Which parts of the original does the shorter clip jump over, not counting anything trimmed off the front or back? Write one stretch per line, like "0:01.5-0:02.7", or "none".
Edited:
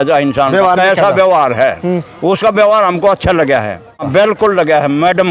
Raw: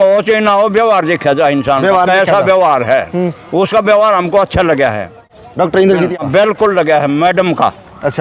0:05.3-0:06.2